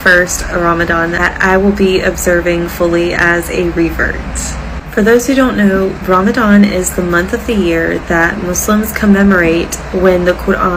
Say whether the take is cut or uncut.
uncut